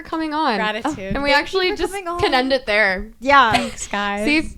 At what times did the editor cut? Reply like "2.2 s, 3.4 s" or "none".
none